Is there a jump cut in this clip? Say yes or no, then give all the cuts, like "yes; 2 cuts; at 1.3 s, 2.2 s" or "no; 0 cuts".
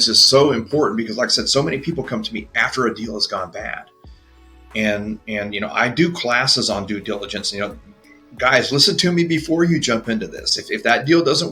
no; 0 cuts